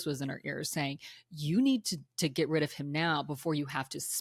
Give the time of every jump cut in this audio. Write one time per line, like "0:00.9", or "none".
none